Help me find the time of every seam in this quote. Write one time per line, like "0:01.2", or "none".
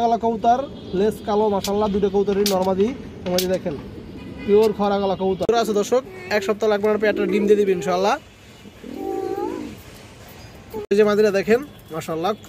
0:05.8
0:10.9